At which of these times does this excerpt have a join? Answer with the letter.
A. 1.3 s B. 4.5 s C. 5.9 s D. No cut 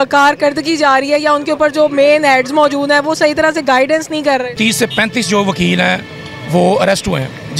B